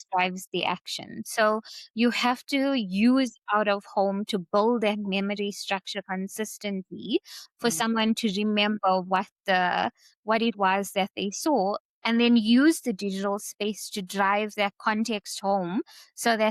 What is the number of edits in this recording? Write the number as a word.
zero